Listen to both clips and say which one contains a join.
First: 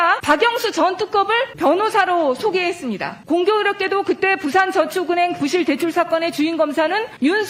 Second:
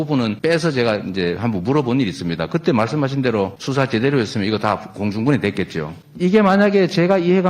second; 1 cut; at 6.0 s

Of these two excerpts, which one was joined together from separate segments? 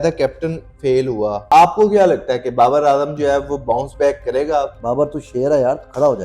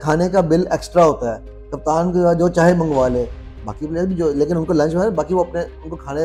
first; 2 cuts; at 1.4 s, 4.8 s

